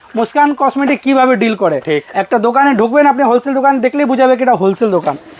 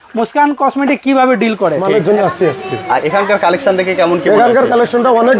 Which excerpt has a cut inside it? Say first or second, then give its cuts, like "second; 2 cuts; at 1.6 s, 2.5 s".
second; 1 cut; at 1.8 s